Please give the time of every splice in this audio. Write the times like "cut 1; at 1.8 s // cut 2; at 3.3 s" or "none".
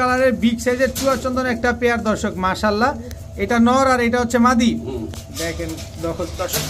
none